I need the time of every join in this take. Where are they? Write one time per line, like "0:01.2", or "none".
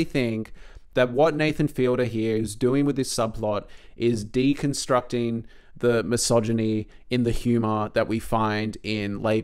none